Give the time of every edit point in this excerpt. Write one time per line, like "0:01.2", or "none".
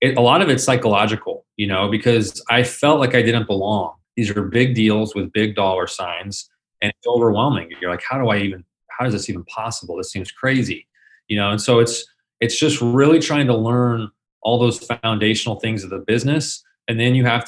0:04.0